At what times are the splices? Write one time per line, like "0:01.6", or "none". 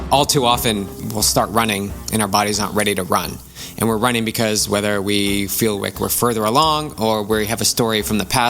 0:01.0